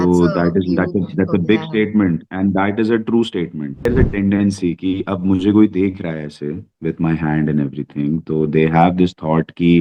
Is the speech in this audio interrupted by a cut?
yes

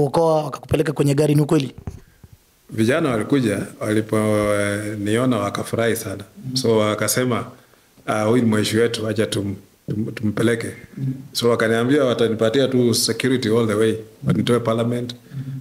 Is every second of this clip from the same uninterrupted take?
yes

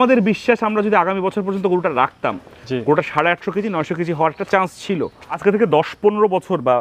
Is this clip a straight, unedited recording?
no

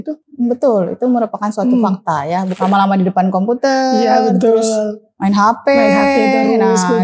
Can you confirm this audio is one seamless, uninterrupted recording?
no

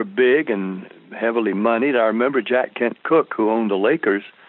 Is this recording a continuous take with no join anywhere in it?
yes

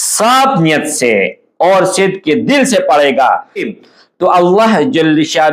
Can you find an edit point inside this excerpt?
yes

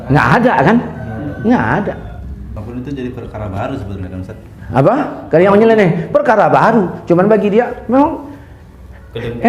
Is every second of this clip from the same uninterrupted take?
no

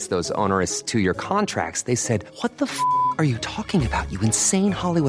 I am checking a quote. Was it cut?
no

